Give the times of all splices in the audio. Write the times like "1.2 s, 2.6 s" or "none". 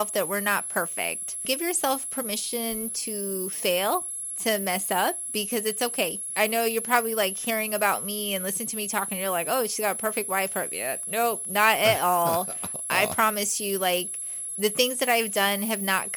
1.5 s, 6.3 s